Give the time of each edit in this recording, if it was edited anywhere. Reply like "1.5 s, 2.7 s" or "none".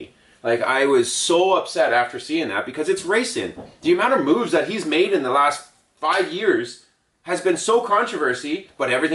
none